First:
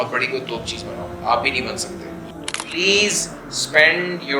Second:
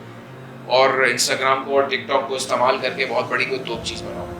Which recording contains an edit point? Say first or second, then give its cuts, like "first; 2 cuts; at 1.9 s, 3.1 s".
first; 1 cut; at 2.3 s